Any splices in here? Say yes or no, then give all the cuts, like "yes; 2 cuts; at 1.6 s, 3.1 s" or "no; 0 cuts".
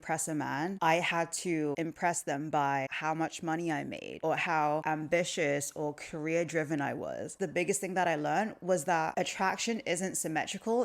yes; 7 cuts; at 0.8 s, 1.7 s, 2.9 s, 4.1 s, 4.8 s, 7.4 s, 9.1 s